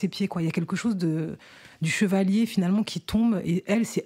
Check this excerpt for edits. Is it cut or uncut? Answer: uncut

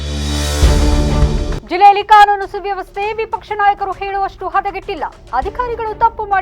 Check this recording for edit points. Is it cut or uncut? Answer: cut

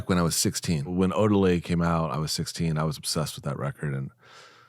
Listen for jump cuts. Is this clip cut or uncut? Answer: cut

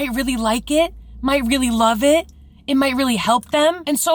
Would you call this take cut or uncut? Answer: uncut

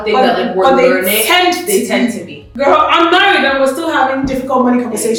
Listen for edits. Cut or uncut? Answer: uncut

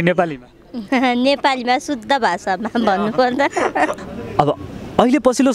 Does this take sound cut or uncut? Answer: cut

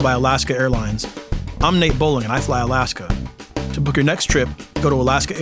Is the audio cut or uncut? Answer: uncut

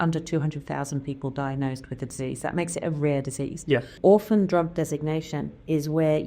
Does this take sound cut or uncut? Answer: cut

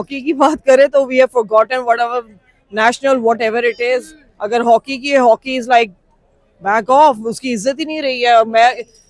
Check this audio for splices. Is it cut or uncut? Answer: uncut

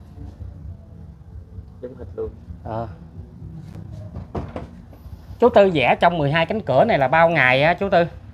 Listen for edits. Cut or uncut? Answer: uncut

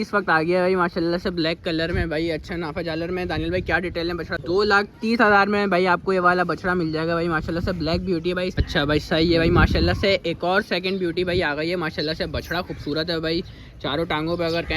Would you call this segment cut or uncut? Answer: cut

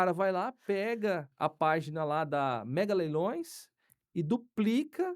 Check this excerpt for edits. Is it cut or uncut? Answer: cut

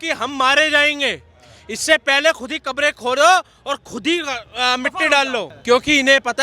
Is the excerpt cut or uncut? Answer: cut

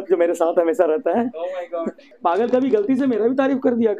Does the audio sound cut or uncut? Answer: cut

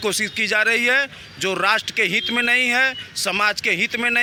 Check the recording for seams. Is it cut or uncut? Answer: uncut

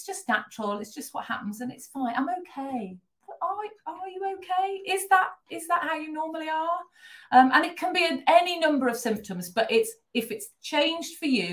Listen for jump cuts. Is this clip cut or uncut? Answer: uncut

